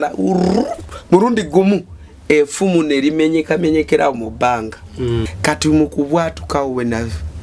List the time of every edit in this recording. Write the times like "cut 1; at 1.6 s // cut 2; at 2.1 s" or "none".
cut 1; at 5.3 s